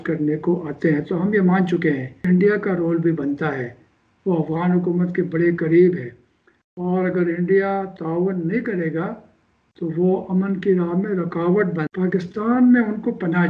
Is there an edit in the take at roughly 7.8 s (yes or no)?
no